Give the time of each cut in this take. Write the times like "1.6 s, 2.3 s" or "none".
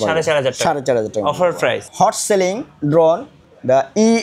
1.8 s